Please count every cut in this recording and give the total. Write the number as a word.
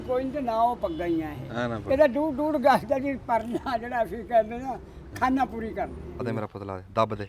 one